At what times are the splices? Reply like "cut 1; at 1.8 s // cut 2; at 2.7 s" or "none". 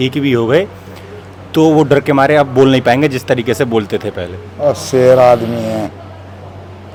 none